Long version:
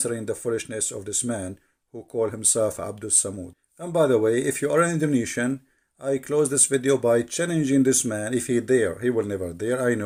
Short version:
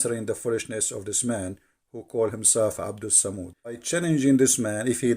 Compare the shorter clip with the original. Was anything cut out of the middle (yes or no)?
yes